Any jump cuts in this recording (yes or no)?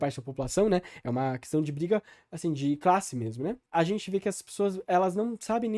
yes